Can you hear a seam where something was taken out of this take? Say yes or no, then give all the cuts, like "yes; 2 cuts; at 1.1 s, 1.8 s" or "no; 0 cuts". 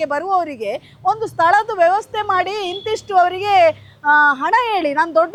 no; 0 cuts